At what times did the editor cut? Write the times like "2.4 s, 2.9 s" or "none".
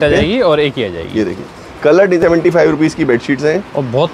2.2 s